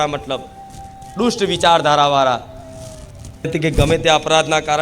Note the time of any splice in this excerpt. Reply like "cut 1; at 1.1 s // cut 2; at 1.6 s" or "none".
cut 1; at 3.5 s